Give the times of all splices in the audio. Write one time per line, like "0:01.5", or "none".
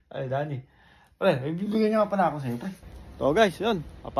0:03.1